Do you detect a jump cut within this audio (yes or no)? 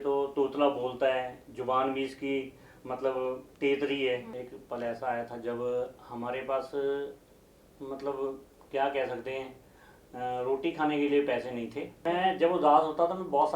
yes